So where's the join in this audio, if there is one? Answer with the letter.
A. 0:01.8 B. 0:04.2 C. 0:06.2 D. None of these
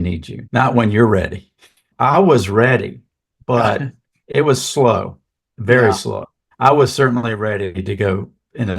B